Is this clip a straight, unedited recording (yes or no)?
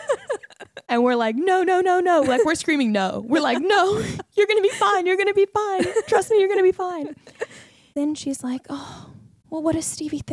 yes